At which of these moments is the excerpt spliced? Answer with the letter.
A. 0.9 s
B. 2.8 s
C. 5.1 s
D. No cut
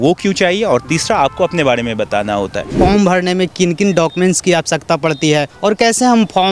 B